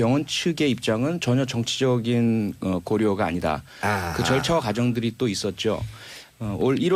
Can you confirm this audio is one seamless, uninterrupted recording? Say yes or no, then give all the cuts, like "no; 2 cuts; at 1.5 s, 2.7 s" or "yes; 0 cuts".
no; 1 cut; at 5.6 s